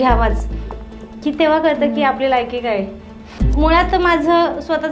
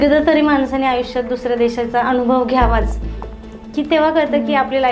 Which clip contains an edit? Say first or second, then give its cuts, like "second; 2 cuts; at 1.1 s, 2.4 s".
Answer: first; 1 cut; at 3.4 s